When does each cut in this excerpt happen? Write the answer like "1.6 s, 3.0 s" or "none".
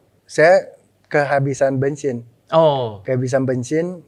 none